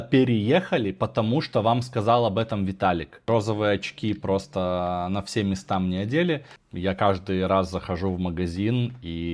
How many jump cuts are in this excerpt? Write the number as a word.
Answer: two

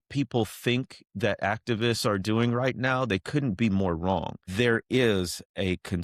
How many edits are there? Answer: one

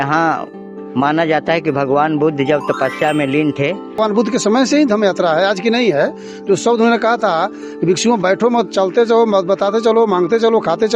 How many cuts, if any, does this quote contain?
one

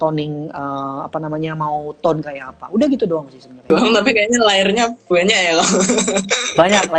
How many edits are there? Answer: one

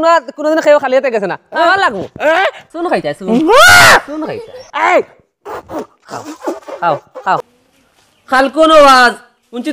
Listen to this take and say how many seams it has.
one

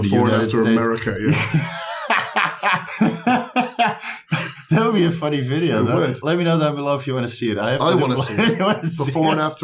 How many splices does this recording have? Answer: two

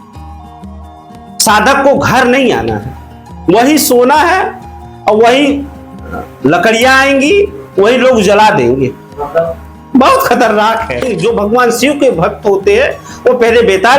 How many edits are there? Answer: one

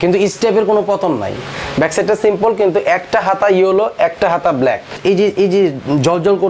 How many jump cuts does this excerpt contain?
two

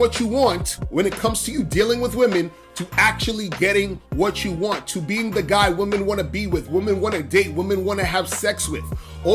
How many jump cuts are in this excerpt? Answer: zero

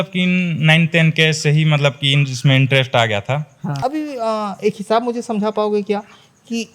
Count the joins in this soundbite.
one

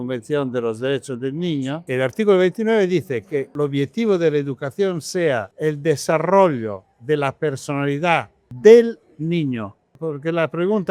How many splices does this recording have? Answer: five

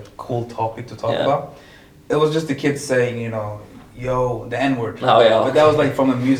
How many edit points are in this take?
zero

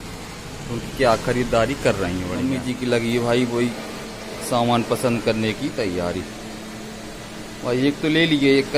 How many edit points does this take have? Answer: one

